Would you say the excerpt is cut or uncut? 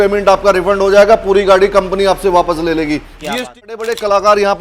cut